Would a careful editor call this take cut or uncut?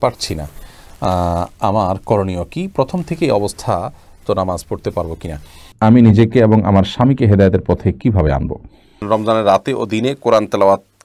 cut